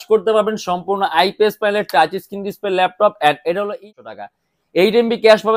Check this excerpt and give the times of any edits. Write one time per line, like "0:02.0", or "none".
0:03.9